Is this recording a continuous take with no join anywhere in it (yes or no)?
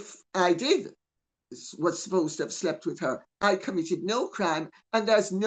yes